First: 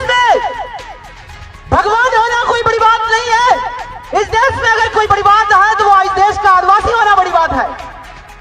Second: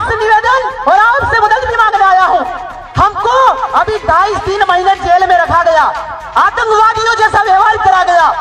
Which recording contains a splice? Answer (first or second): first